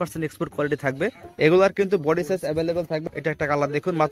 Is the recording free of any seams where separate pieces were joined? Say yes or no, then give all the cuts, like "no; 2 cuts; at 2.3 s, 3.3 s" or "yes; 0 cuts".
no; 2 cuts; at 1.2 s, 3.1 s